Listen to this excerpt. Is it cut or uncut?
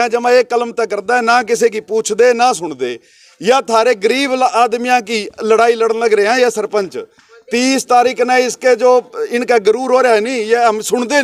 uncut